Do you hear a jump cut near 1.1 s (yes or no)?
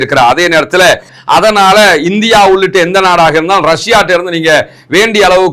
yes